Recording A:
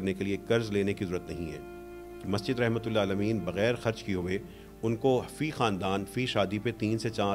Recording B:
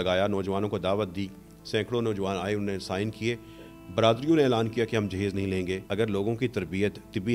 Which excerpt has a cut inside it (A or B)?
B